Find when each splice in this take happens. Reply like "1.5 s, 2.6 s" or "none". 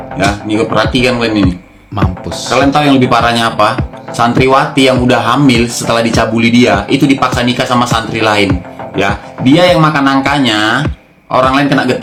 none